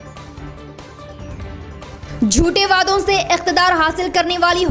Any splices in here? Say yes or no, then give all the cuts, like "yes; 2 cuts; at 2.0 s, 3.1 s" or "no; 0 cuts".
no; 0 cuts